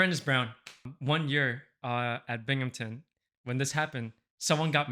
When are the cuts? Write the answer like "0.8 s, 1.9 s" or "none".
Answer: 0.9 s